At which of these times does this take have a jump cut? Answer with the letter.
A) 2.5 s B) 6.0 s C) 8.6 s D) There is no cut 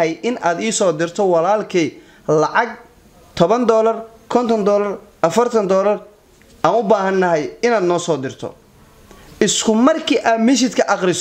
C